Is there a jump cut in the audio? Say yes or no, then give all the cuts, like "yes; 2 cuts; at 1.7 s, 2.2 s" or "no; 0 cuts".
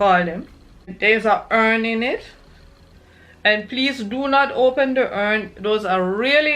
yes; 1 cut; at 0.9 s